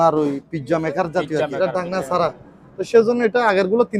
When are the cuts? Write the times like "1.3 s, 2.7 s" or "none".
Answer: 1.5 s